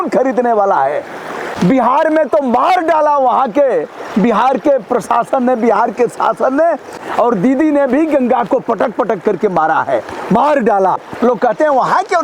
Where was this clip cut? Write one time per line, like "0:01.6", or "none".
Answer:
0:01.4
0:07.0
0:11.1